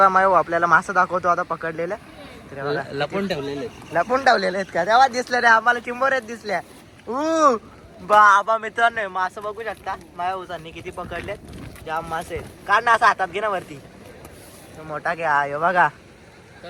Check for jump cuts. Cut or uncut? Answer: uncut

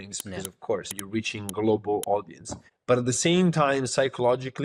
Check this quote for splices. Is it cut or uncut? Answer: cut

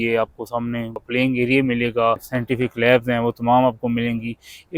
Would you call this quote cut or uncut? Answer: cut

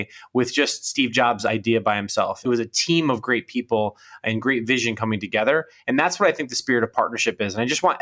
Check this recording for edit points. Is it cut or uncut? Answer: cut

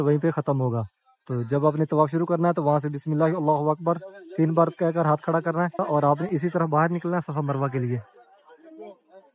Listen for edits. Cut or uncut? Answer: cut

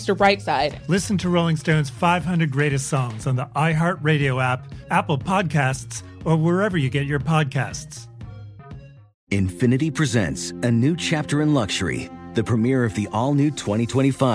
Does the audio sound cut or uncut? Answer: cut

